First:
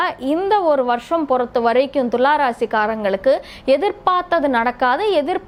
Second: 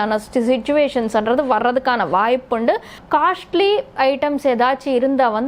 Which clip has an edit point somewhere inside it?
second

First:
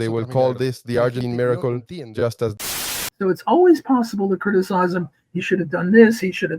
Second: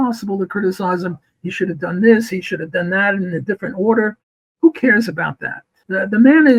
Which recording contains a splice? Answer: first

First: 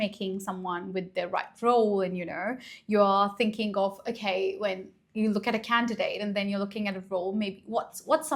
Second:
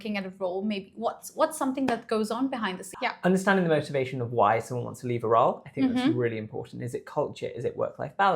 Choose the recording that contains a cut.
second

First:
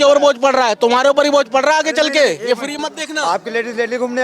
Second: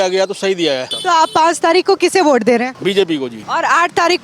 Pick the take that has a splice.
second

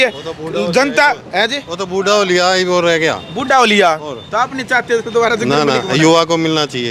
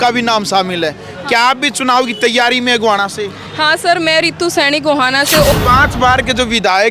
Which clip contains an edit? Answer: second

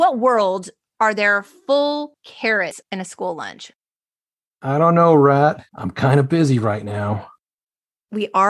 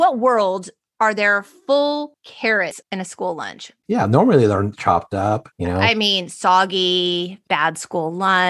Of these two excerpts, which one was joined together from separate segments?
first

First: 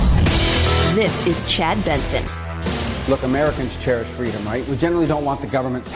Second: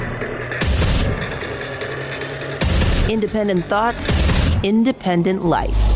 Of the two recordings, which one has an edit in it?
first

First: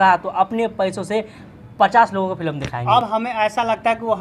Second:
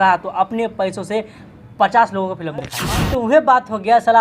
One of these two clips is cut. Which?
second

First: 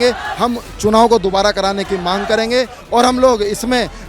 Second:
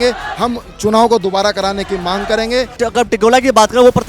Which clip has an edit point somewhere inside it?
second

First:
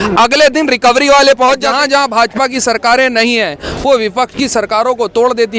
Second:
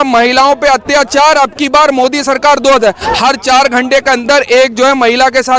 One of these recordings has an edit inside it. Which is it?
first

